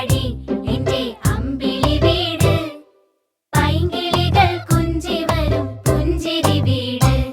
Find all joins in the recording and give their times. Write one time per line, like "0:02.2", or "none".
0:03.8
0:06.2